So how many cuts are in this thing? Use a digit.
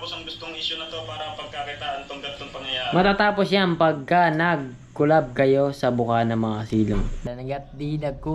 1